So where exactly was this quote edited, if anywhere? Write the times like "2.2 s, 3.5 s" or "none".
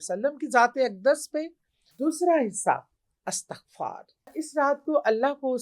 1.8 s, 4.4 s